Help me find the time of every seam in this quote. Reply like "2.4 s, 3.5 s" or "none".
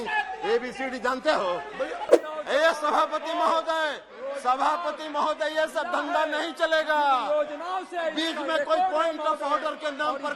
2.1 s